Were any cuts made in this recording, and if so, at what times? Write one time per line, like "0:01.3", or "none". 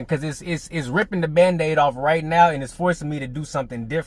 none